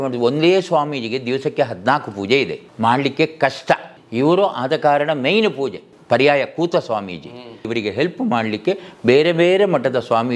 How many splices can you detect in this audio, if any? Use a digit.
4